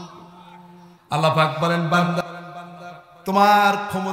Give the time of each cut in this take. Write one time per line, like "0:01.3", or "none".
0:02.1